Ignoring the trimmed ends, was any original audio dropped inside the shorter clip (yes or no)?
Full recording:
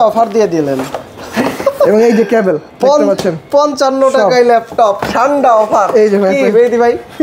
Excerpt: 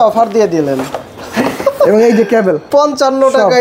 yes